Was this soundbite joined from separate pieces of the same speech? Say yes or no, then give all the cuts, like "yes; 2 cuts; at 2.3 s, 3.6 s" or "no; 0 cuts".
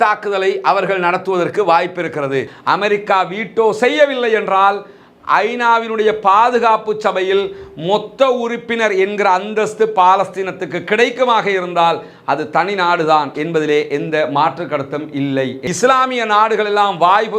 yes; 2 cuts; at 2.5 s, 15.6 s